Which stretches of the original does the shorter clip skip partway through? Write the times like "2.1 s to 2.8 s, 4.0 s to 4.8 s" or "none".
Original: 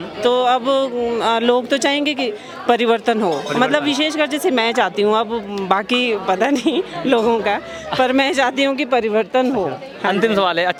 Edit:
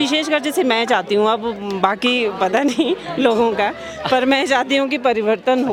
none

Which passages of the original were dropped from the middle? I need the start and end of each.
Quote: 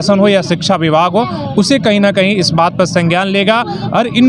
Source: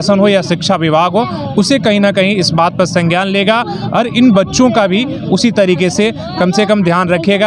none

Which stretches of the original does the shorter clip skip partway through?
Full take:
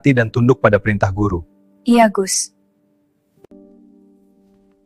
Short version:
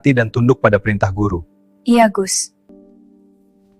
2.7 s to 3.5 s

